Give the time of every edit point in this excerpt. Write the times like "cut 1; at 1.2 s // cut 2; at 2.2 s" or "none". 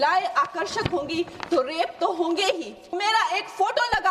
cut 1; at 2.9 s